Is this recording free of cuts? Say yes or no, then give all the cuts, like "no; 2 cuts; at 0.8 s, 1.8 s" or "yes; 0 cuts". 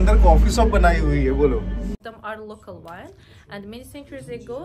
no; 1 cut; at 2.0 s